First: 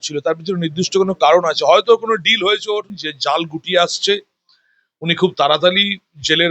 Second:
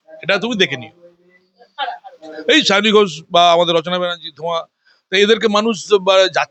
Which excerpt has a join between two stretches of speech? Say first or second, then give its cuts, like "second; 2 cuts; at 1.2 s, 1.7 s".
first; 1 cut; at 2.9 s